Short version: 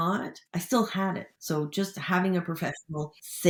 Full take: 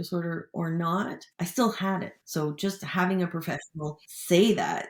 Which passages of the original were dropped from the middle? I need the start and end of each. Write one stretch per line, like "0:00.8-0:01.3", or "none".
none